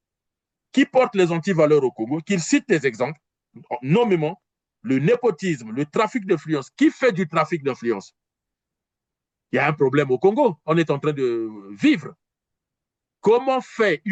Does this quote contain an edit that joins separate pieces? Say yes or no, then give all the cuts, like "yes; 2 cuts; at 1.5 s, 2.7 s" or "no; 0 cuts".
no; 0 cuts